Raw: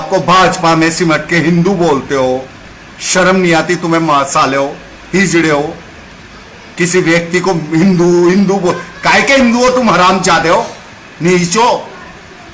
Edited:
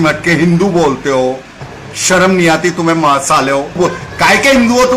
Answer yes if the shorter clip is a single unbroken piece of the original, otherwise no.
no